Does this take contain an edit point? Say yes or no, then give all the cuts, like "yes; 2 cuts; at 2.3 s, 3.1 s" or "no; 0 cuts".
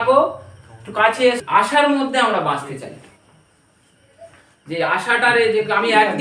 yes; 1 cut; at 1.4 s